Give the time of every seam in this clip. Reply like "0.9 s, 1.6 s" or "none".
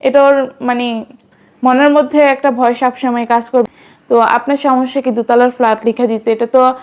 3.7 s